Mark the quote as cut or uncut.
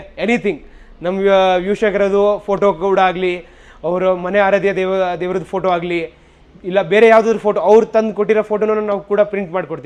uncut